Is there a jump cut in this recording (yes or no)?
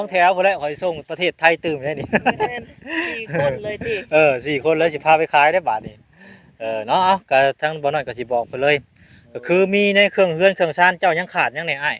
no